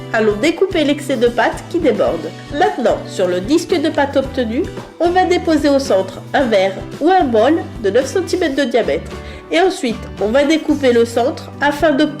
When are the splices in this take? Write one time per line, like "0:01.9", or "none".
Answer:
none